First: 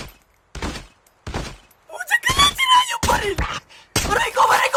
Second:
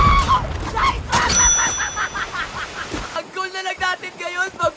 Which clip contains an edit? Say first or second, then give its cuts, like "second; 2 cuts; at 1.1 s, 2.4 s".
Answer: second; 1 cut; at 3.2 s